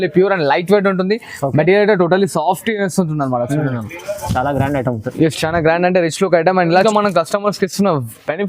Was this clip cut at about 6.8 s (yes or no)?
yes